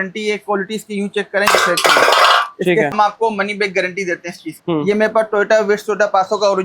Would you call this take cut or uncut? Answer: cut